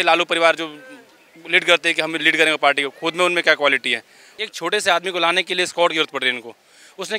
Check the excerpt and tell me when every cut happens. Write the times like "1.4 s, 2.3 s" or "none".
4.4 s